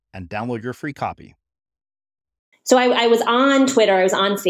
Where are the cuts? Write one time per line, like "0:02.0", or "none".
0:02.5

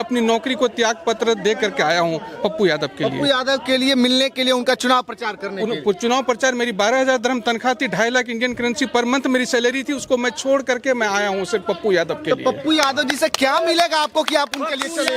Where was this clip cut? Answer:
none

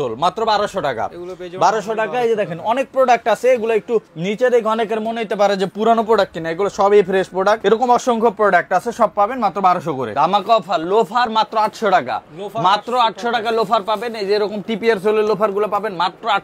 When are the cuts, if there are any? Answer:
0:04.2
0:07.6
0:10.1

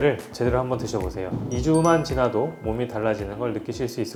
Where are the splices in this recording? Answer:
none

